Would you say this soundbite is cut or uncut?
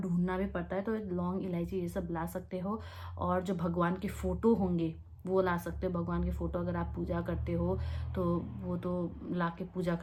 uncut